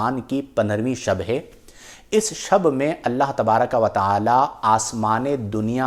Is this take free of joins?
yes; 0 cuts

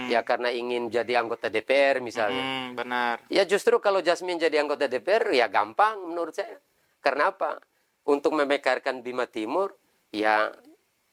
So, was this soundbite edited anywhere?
no; 0 cuts

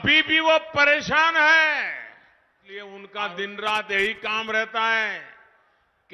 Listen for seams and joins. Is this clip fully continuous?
yes; 0 cuts

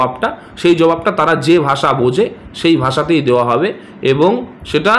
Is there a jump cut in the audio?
no; 0 cuts

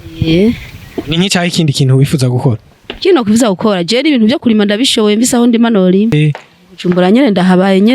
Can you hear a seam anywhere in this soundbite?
yes; 1 cut; at 6.1 s

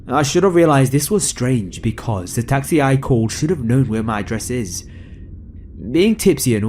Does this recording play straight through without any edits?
no; 1 cut; at 5.6 s

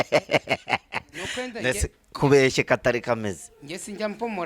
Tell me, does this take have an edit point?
no; 0 cuts

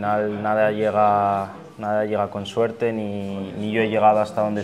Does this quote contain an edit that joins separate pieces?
no; 0 cuts

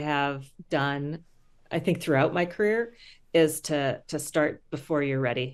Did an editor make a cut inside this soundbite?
no; 0 cuts

